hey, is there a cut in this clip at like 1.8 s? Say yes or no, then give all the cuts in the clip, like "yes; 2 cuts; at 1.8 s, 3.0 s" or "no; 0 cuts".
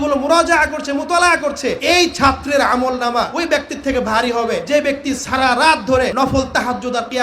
yes; 4 cuts; at 1.8 s, 3.3 s, 4.6 s, 6.1 s